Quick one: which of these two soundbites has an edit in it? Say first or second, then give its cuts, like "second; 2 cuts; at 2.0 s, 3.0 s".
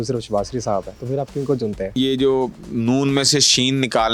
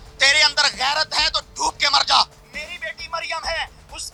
first; 2 cuts; at 1.0 s, 2.0 s